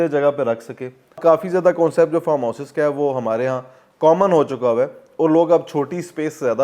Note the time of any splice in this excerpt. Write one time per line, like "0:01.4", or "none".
0:01.2